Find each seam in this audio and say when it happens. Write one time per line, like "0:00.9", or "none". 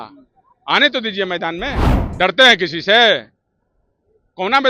0:01.8

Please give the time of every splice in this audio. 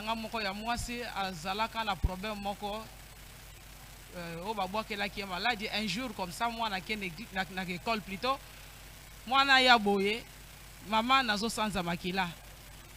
none

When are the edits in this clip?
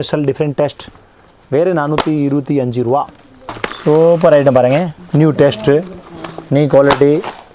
0:03.7

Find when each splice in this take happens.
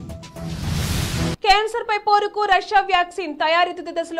0:01.4

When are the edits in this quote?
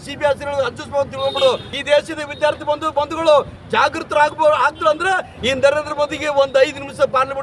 0:01.7

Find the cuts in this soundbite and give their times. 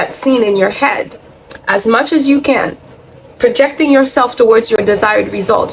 0:04.8

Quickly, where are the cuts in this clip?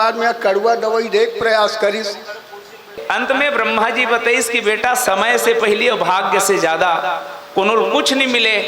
0:03.0

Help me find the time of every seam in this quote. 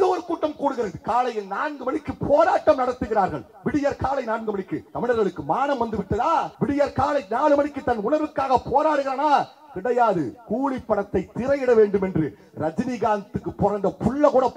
0:04.8
0:06.5

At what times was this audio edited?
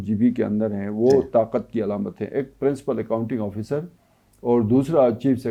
none

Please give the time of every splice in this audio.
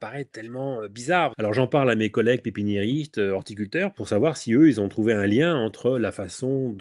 0:01.3
0:04.0

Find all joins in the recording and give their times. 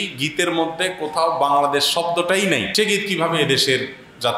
0:02.7

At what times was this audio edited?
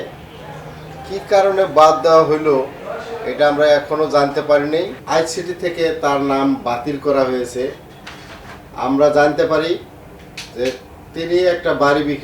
0:05.0

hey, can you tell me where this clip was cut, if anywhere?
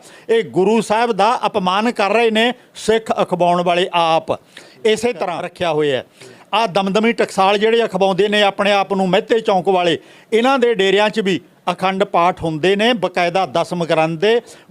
0:05.4

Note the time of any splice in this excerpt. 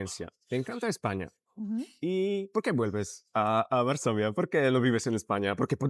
none

